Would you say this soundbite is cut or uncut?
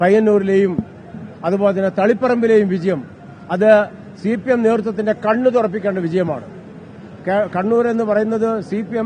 uncut